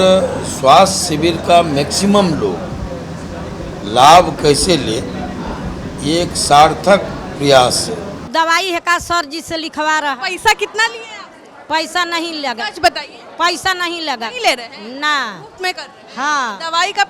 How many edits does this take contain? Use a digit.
1